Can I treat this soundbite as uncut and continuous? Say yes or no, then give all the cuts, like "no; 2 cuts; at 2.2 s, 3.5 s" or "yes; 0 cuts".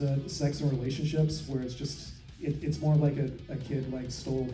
yes; 0 cuts